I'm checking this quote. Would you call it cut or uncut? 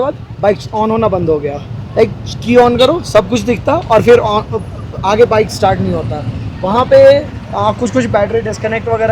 uncut